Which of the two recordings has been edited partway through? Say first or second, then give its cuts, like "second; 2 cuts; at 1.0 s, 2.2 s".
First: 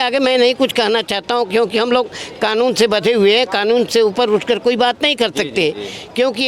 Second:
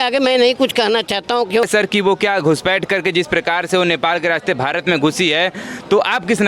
second; 1 cut; at 1.7 s